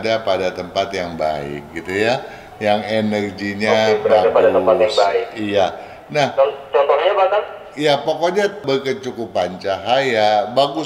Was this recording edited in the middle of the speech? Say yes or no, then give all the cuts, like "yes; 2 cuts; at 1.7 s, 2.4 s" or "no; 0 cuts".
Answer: no; 0 cuts